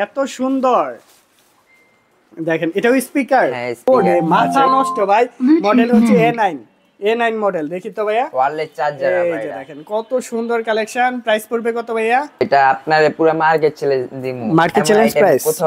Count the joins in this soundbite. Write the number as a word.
two